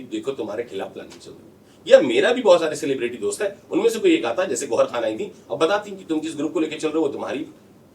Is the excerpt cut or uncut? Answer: uncut